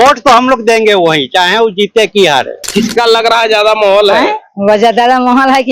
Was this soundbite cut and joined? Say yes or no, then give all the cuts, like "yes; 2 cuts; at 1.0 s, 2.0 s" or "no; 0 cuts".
yes; 1 cut; at 2.7 s